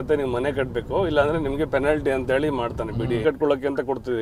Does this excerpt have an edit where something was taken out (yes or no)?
yes